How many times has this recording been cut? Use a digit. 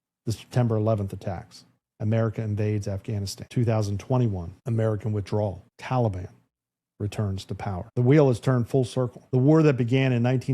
5